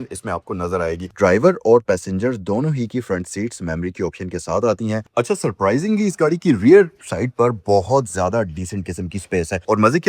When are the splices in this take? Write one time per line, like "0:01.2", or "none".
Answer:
0:01.1
0:05.1